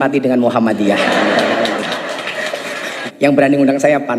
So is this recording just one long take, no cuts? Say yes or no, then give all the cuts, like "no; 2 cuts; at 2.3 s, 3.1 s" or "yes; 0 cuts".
no; 1 cut; at 3.0 s